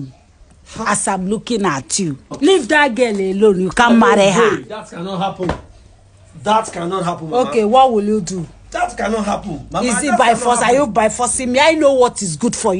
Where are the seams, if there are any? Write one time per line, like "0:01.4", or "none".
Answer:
0:02.3